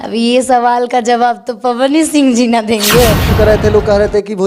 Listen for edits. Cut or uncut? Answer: cut